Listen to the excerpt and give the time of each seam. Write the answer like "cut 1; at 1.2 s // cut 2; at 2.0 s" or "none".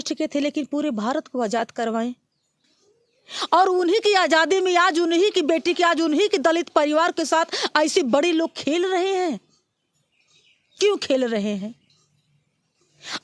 none